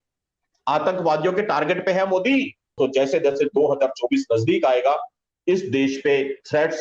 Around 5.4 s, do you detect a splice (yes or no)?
no